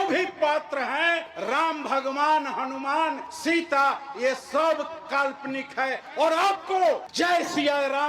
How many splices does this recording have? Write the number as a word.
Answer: three